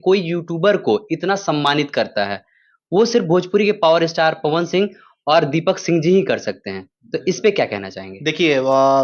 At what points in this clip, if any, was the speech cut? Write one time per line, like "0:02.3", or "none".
none